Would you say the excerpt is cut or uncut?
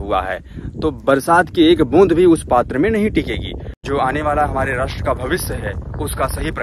cut